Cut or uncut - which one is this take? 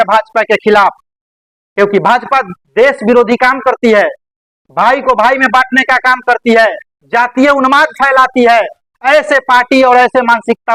uncut